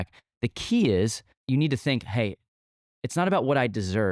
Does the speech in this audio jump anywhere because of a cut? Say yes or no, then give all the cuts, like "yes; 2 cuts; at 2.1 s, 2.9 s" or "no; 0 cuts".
yes; 1 cut; at 1.3 s